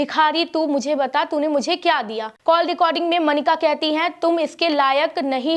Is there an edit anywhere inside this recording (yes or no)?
yes